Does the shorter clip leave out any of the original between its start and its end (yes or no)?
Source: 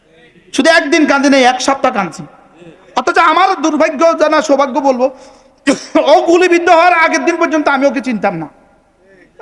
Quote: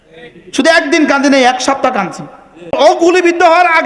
yes